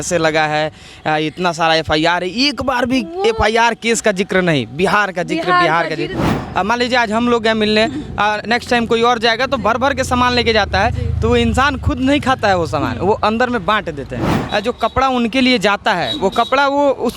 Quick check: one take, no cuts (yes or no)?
no